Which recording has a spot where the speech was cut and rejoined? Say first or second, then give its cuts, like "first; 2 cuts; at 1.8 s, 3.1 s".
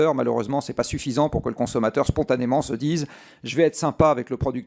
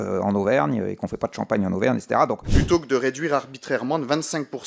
second; 1 cut; at 2.5 s